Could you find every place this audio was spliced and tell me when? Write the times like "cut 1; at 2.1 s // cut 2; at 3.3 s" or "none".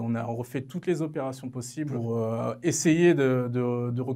cut 1; at 2.0 s

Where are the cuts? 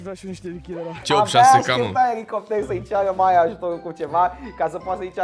cut 1; at 1.0 s

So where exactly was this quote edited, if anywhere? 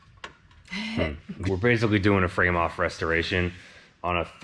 cut 1; at 1.4 s

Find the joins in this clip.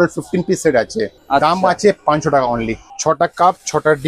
cut 1; at 1.2 s // cut 2; at 2.8 s

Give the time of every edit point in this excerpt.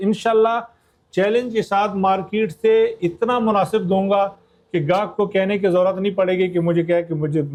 none

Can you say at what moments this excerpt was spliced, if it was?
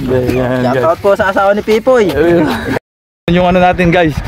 cut 1; at 2.7 s

